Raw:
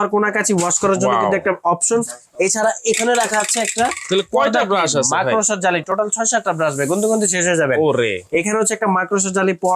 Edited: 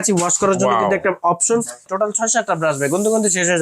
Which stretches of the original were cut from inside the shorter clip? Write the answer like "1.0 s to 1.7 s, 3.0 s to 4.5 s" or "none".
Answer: 2.3 s to 5.9 s

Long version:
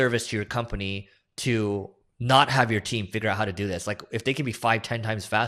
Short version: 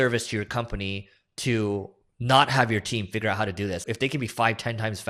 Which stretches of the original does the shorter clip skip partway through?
3.8 s to 4.1 s

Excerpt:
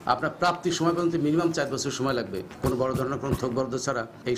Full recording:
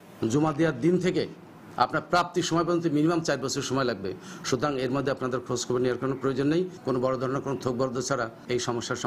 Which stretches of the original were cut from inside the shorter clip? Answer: 4.2 s to 6.8 s

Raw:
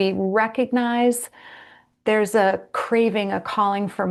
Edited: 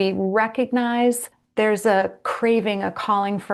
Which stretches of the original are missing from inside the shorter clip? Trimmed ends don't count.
1.3 s to 1.8 s

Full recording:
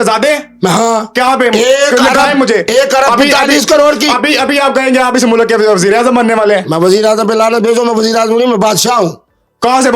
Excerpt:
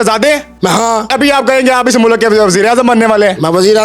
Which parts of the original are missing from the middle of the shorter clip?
1.1 s to 4.4 s

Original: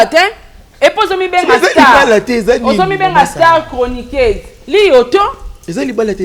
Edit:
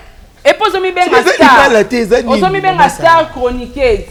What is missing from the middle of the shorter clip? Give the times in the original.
none

